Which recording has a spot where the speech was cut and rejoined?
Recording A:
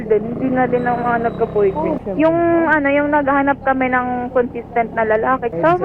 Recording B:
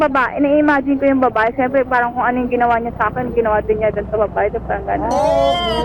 A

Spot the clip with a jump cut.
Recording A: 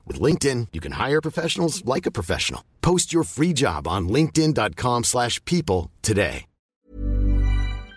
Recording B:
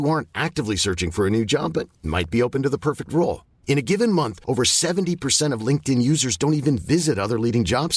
A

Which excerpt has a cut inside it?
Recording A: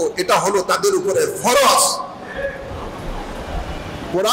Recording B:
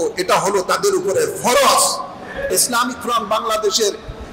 B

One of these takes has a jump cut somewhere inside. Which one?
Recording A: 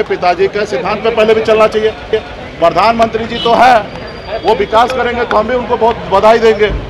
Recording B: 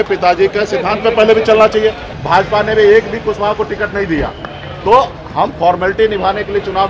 B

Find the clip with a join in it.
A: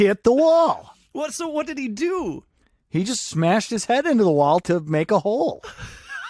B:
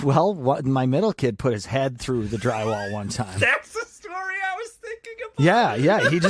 A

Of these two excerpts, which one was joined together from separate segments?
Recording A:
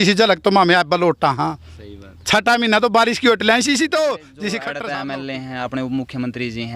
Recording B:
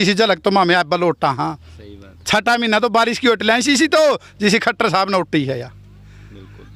A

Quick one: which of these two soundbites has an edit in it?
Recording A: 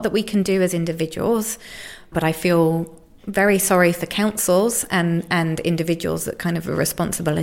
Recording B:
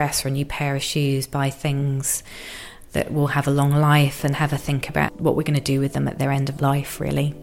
B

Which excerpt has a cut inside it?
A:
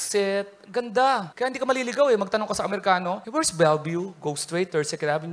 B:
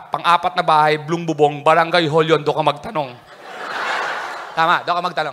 A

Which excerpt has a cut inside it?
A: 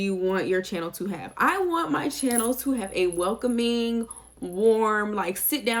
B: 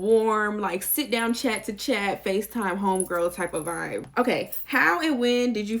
B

